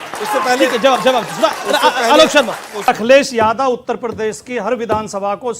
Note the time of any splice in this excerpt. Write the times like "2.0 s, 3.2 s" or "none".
2.9 s